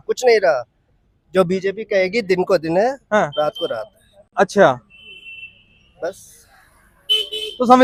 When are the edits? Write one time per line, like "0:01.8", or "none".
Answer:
none